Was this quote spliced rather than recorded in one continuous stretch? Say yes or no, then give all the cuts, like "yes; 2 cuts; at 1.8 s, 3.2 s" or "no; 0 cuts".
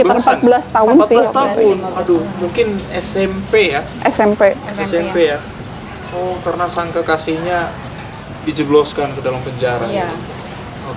no; 0 cuts